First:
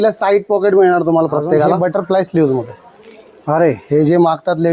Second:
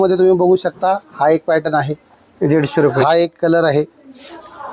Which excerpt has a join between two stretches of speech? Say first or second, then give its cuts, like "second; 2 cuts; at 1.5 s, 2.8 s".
first; 1 cut; at 1.8 s